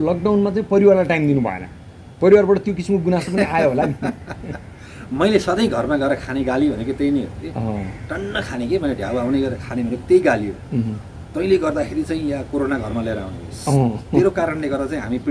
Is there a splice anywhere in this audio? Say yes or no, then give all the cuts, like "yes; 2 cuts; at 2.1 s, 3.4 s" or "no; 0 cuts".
no; 0 cuts